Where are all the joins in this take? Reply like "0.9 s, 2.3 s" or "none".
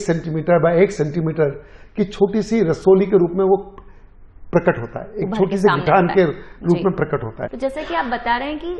7.5 s